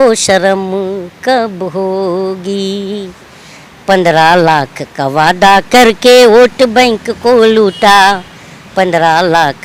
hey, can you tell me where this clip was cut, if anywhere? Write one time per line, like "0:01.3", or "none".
none